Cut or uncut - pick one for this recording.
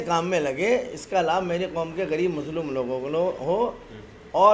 uncut